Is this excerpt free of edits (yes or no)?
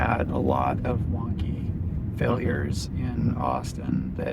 yes